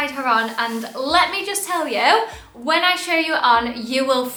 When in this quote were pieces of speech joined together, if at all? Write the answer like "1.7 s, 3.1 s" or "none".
none